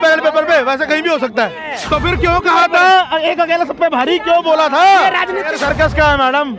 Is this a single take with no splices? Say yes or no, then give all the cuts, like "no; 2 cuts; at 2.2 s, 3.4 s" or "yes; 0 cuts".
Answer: no; 2 cuts; at 1.7 s, 5.5 s